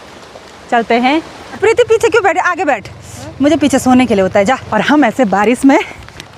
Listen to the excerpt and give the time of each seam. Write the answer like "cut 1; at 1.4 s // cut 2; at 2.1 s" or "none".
cut 1; at 1.4 s // cut 2; at 4.6 s